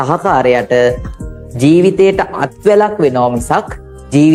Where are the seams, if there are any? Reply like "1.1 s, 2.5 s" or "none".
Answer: none